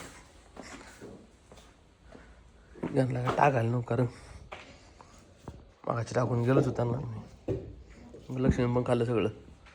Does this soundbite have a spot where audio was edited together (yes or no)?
no